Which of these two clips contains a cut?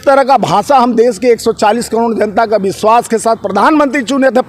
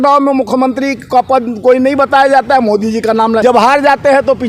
second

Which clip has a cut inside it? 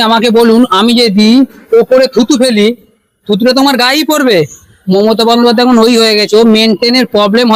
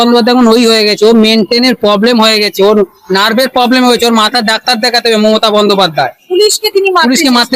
second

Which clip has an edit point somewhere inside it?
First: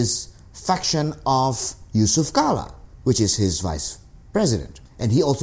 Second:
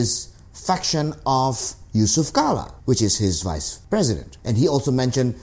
second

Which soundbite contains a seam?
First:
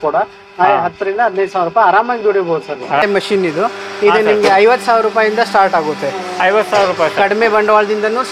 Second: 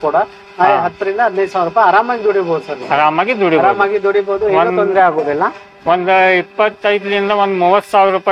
first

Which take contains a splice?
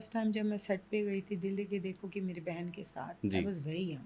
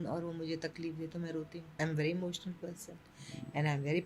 second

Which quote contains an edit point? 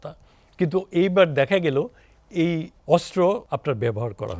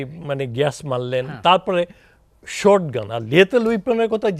first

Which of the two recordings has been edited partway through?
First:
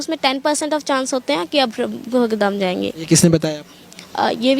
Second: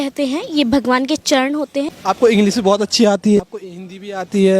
second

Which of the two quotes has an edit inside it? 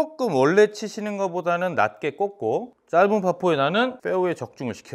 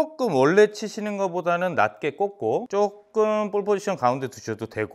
first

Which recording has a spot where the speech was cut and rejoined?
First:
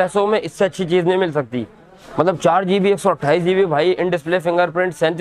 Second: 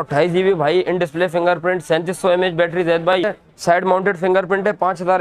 second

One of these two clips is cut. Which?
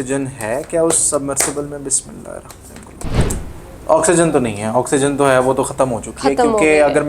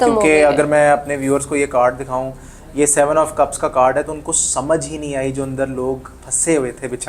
first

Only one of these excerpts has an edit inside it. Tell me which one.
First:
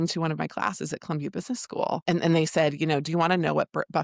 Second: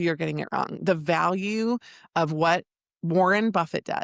first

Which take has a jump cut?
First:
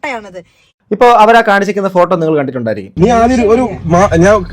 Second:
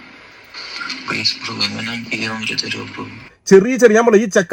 first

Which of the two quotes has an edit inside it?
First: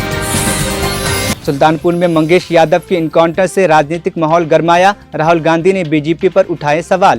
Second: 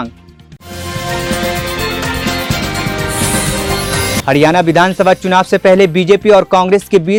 first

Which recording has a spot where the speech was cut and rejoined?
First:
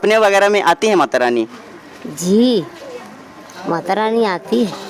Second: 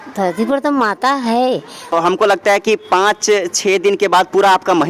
second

